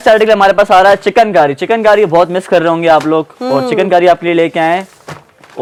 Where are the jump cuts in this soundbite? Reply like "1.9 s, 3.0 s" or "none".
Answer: none